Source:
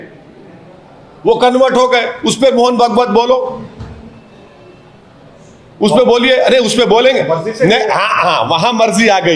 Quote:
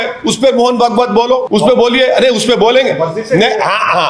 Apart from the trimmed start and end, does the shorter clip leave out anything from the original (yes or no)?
yes